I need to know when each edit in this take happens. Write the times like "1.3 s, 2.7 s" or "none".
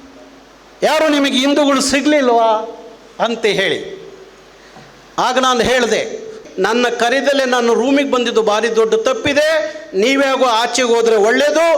6.4 s